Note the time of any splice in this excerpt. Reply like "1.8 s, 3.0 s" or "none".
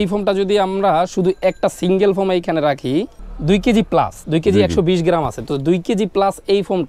3.3 s